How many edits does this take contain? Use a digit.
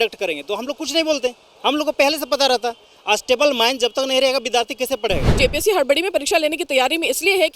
1